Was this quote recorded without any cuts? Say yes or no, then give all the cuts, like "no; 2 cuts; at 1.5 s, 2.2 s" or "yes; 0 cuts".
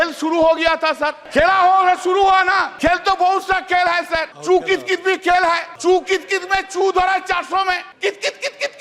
no; 5 cuts; at 1.2 s, 2.7 s, 4.3 s, 5.7 s, 7.9 s